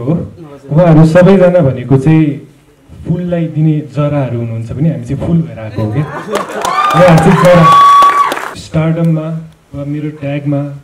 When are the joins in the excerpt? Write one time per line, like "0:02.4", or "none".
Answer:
0:08.5